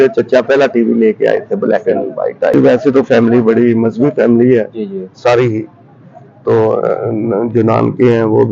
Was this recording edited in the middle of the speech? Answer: yes; 1 cut; at 2.5 s

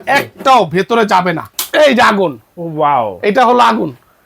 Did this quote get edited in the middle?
yes; 1 cut; at 1.5 s

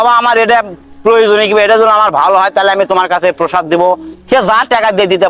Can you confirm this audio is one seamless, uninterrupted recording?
yes; 0 cuts

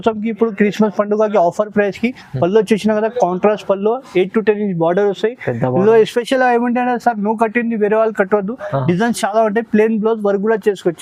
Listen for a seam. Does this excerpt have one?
no; 0 cuts

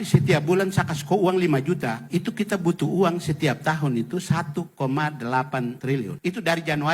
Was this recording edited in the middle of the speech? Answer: yes; 2 cuts; at 2.0 s, 5.9 s

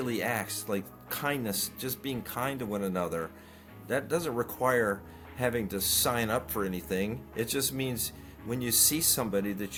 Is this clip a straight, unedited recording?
yes; 0 cuts

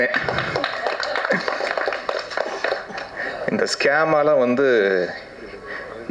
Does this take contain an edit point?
no; 0 cuts

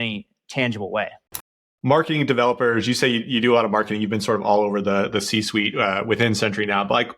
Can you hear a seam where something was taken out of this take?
yes; 1 cut; at 1.5 s

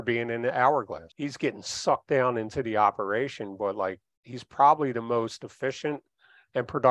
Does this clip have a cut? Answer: yes; 1 cut; at 1.0 s

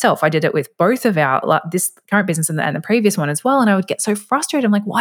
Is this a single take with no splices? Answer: yes; 0 cuts

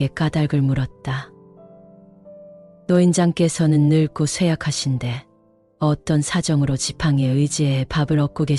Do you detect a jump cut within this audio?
no; 0 cuts

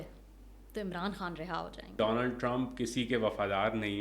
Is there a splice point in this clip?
yes; 1 cut; at 1.9 s

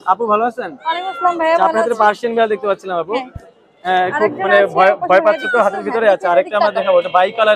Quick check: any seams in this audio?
no; 0 cuts

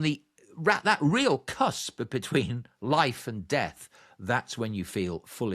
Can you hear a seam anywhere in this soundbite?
no; 0 cuts

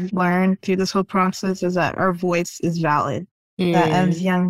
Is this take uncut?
yes; 0 cuts

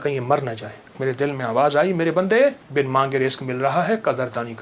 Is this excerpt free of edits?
no; 2 cuts; at 1.0 s, 2.6 s

